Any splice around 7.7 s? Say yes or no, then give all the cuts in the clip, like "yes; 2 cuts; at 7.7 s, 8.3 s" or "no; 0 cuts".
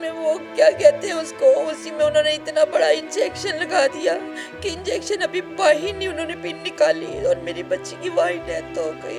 no; 0 cuts